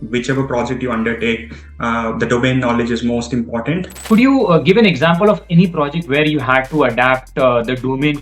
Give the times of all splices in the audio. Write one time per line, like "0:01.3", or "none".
0:04.0

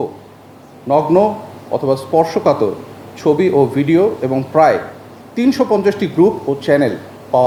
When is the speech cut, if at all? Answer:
none

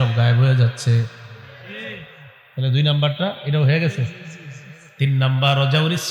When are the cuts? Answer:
none

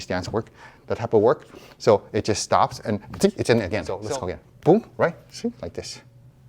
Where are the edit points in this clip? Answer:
0:03.9

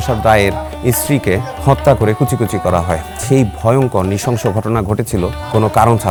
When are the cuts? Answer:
none

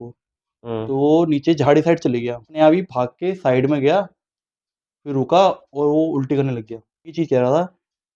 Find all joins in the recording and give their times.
0:02.6
0:07.2

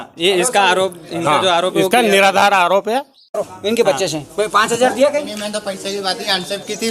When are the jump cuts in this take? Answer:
0:03.4

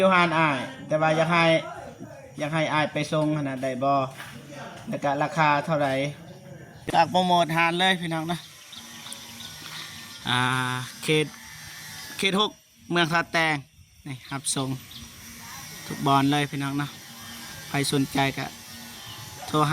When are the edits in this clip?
0:06.9

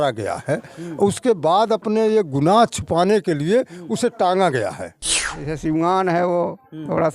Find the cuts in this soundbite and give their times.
0:05.4

